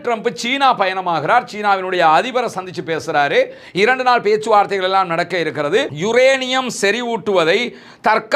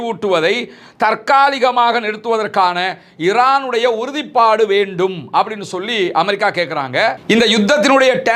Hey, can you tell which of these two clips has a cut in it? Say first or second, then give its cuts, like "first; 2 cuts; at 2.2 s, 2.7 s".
first; 1 cut; at 5.9 s